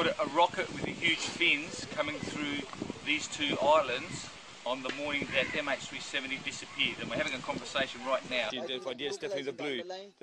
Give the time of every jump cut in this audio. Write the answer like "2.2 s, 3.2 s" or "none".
8.5 s